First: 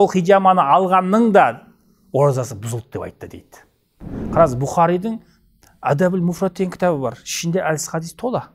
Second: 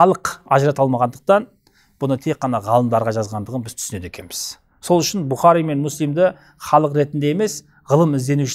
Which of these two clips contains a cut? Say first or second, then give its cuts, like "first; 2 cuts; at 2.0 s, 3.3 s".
first; 1 cut; at 4.2 s